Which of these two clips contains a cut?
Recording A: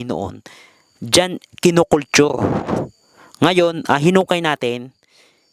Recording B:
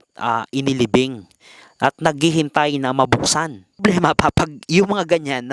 B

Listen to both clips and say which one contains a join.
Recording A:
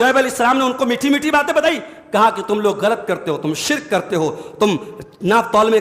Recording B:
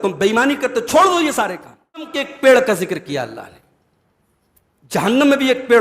B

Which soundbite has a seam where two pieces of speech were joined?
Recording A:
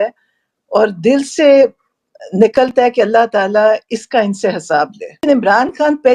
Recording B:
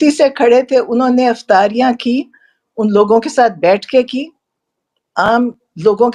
A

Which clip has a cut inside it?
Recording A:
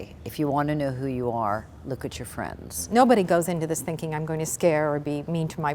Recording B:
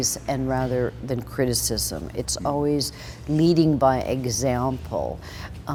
A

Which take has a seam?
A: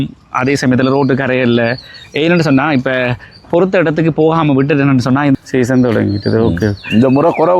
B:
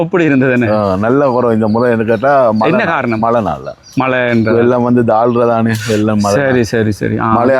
A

